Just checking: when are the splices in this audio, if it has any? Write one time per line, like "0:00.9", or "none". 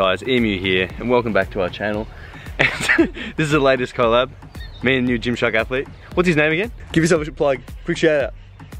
none